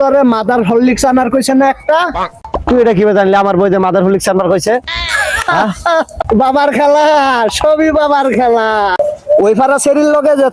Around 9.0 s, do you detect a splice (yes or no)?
yes